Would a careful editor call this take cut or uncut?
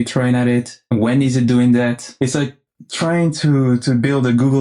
cut